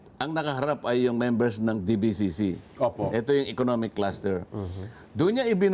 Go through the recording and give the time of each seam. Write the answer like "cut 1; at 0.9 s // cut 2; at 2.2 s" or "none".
none